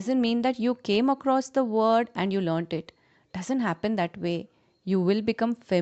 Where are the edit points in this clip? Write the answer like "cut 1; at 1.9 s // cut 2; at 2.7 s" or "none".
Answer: none

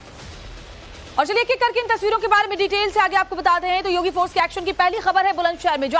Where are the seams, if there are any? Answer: cut 1; at 1.5 s

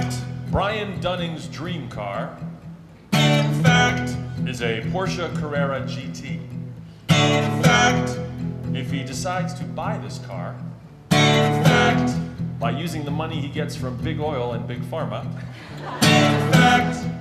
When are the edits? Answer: none

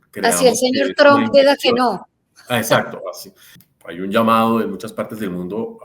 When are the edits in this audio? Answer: cut 1; at 3.6 s

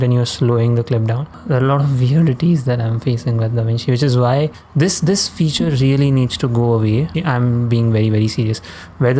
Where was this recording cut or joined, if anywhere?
cut 1; at 1.3 s // cut 2; at 4.6 s // cut 3; at 7.1 s

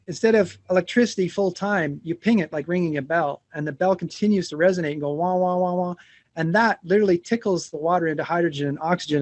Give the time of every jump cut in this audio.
none

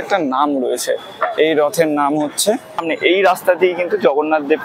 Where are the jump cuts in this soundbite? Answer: cut 1; at 2.8 s

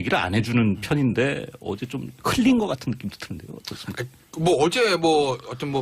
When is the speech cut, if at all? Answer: cut 1; at 1.7 s

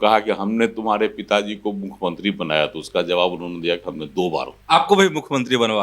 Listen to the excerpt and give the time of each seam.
cut 1; at 4.6 s

